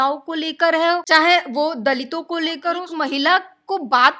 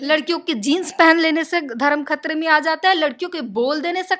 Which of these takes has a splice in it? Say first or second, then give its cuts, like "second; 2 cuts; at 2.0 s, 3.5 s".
first; 2 cuts; at 1.0 s, 2.9 s